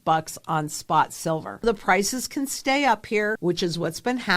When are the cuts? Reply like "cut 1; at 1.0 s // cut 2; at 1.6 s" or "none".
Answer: cut 1; at 1.6 s // cut 2; at 3.4 s